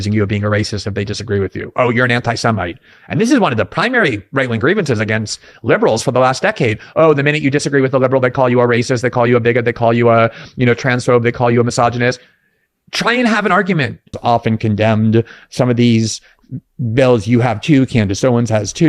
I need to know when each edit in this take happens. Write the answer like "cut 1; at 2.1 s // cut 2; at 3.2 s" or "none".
cut 1; at 14.2 s